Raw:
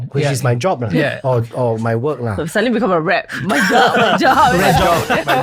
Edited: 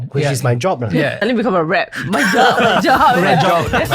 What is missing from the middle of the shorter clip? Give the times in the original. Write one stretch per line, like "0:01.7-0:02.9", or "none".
0:01.2-0:02.5

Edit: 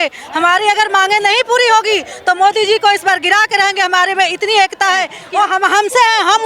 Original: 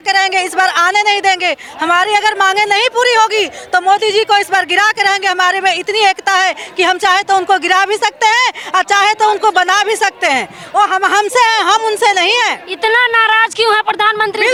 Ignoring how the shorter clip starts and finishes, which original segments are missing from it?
0:06.6-0:10.6

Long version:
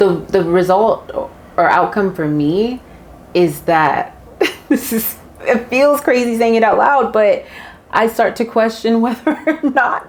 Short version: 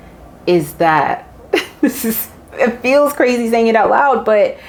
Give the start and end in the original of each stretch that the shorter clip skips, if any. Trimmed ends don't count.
none

